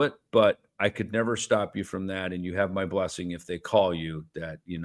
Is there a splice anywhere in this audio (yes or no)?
no